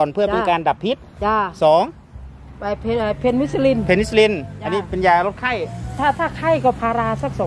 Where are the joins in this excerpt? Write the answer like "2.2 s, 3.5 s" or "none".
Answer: none